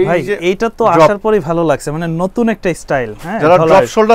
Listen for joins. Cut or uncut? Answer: uncut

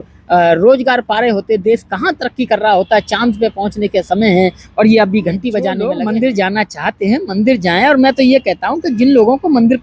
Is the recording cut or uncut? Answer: cut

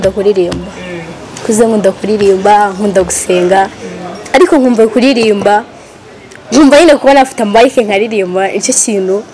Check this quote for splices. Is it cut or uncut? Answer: uncut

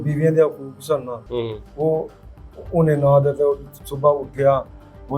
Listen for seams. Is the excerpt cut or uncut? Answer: uncut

